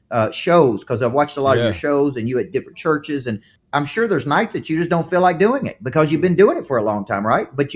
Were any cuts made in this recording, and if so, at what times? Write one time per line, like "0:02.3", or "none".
0:03.5